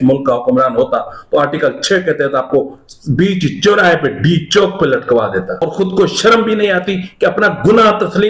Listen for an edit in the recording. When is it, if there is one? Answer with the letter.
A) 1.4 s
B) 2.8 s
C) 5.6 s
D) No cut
C